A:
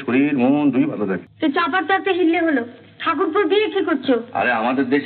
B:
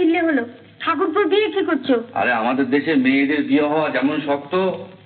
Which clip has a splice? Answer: A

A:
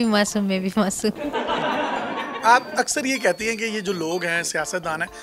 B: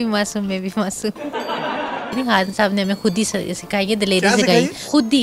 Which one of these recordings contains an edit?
B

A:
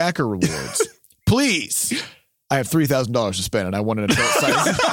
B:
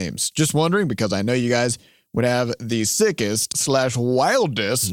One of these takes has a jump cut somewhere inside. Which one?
B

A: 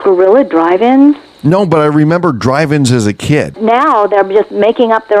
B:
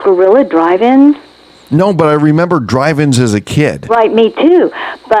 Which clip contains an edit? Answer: A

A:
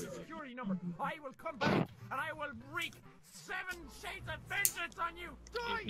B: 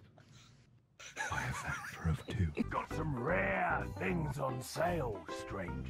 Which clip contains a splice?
B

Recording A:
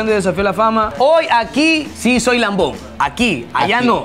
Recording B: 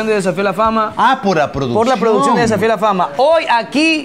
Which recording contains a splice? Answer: A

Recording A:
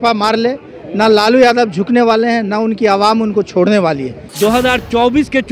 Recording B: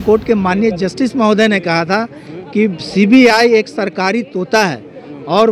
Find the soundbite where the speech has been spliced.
A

